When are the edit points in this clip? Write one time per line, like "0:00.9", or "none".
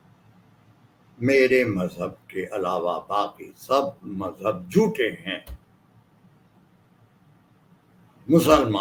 none